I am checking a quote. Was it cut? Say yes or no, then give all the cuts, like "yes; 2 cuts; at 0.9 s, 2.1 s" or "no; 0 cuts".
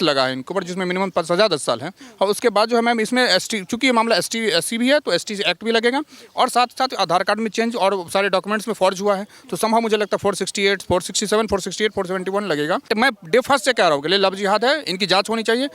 yes; 1 cut; at 12.9 s